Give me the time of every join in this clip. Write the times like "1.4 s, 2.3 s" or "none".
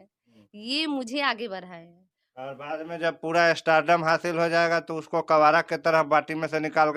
none